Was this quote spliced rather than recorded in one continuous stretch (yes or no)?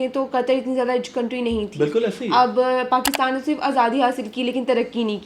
no